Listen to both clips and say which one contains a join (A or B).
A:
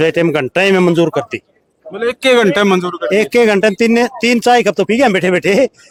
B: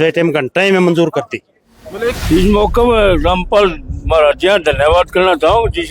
B